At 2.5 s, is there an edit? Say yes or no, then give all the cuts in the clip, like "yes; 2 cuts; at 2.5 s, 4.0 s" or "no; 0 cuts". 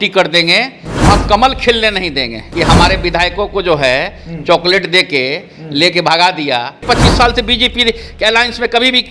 yes; 2 cuts; at 2.5 s, 6.8 s